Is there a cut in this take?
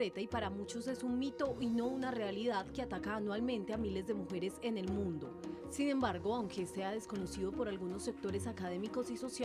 no; 0 cuts

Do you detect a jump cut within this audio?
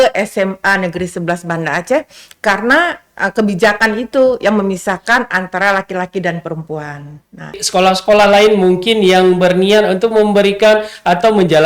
yes; 1 cut; at 7.6 s

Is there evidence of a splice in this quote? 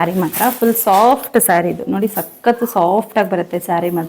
no; 0 cuts

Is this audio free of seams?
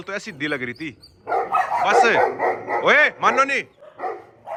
yes; 0 cuts

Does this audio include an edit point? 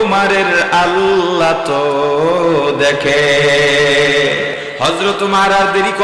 yes; 1 cut; at 4.6 s

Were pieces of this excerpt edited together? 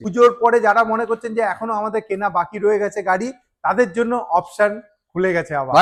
no; 0 cuts

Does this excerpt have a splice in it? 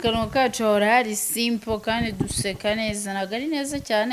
no; 0 cuts

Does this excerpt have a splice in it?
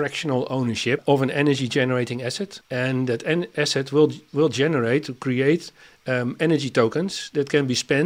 yes; 2 cuts; at 1.0 s, 2.5 s

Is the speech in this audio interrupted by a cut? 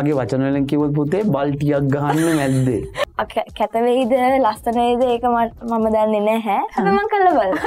yes; 1 cut; at 2.9 s

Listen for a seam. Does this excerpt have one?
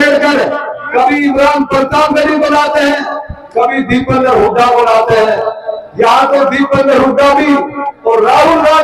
no; 0 cuts

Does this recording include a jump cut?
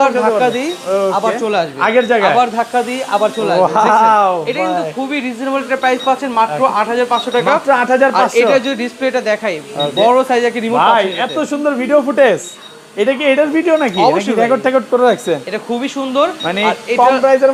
no; 0 cuts

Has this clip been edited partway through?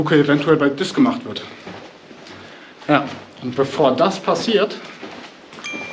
no; 0 cuts

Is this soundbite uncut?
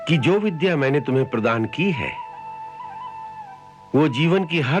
yes; 0 cuts

